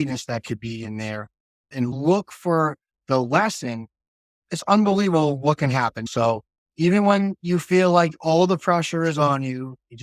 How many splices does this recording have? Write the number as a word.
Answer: two